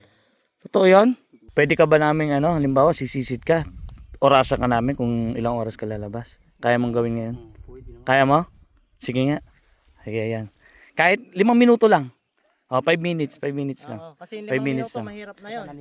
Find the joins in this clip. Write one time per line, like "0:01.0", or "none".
0:01.3